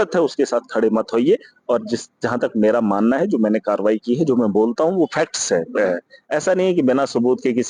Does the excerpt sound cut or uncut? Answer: uncut